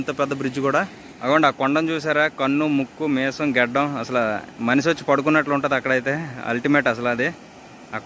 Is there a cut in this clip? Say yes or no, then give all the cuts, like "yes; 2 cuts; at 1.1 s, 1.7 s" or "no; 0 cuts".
yes; 1 cut; at 1.2 s